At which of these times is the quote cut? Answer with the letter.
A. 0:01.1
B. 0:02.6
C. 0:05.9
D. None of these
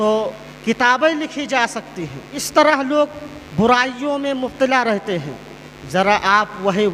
D